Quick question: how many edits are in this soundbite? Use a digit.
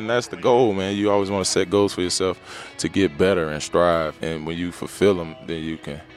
1